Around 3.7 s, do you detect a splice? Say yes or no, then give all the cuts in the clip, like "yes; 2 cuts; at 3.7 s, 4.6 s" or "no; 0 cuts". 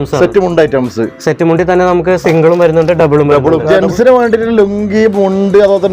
yes; 1 cut; at 3.7 s